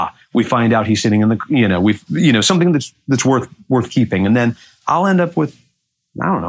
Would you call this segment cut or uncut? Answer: uncut